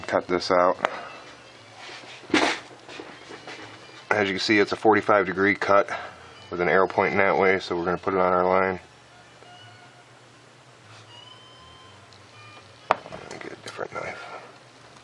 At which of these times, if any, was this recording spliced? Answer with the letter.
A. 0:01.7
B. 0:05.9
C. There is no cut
B